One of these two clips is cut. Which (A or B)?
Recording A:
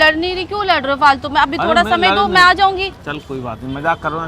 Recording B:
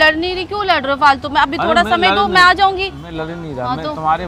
A